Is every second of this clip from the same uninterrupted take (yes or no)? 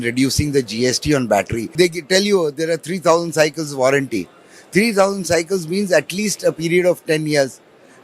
no